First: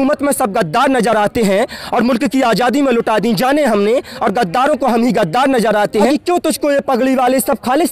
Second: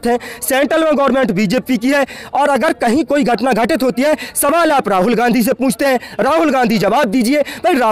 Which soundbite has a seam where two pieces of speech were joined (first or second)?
first